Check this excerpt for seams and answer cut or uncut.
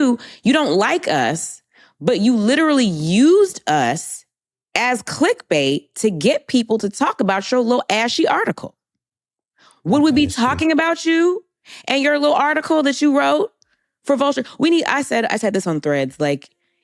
uncut